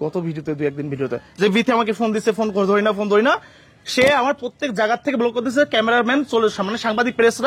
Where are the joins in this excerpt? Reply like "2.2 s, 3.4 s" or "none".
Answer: 1.2 s